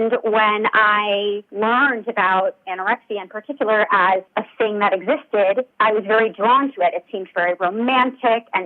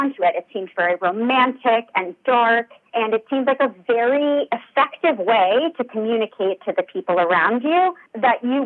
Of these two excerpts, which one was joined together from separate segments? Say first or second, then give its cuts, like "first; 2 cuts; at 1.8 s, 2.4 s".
first; 2 cuts; at 1.5 s, 4.3 s